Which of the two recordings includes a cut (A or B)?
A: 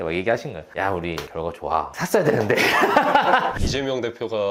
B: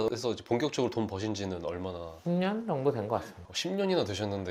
A